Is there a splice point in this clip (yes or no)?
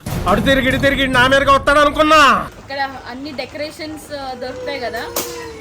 yes